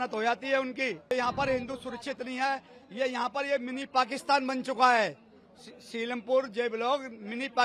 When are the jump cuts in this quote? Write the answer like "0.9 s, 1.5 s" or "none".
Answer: 1.1 s